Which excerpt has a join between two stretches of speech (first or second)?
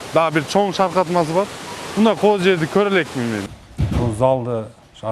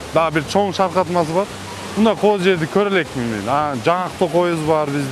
first